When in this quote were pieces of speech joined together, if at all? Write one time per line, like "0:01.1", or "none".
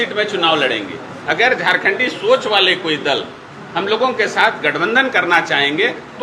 none

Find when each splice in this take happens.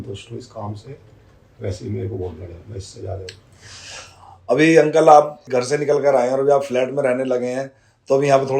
0:05.4

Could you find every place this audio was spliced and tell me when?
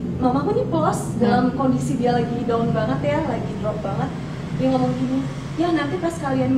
none

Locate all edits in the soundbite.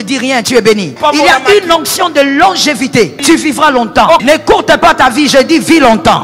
0:01.0
0:03.1
0:04.2

